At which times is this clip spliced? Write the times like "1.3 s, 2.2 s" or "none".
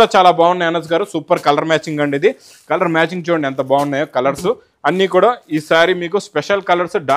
none